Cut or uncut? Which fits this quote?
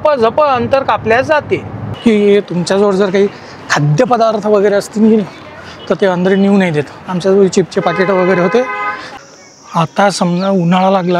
cut